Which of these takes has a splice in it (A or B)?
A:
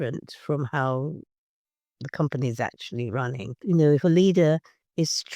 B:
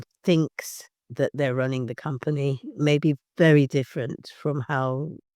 A